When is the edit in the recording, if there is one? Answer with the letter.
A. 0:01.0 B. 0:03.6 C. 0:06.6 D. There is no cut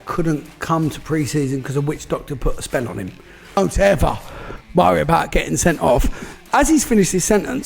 B